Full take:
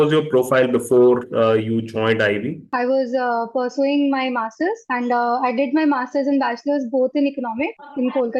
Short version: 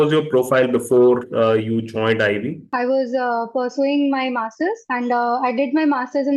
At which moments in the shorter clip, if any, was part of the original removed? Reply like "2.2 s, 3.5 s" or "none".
none